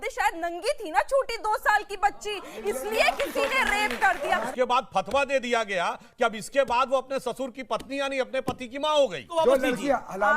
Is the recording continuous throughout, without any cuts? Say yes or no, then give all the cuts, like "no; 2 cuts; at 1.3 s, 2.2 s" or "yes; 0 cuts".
no; 2 cuts; at 4.5 s, 9.3 s